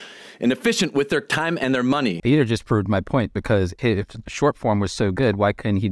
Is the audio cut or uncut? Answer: cut